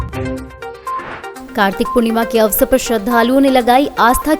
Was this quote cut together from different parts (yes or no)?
yes